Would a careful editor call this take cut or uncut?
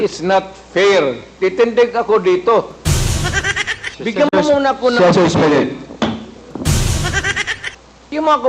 cut